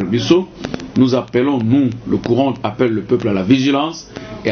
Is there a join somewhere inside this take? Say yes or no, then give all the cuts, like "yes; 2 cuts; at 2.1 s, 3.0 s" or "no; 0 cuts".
no; 0 cuts